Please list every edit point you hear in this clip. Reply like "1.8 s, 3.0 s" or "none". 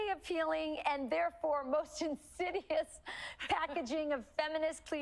none